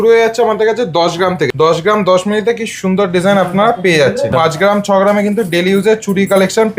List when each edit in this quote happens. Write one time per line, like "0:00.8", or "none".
0:01.5
0:04.3